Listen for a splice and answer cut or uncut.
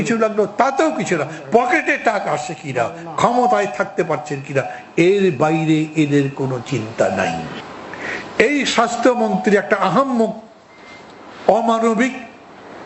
cut